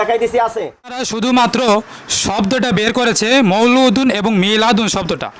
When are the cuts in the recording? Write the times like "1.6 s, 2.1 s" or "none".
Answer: 1.0 s